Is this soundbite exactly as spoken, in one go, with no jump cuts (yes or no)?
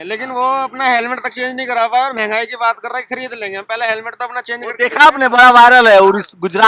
yes